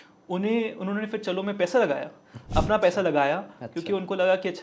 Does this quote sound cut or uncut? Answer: uncut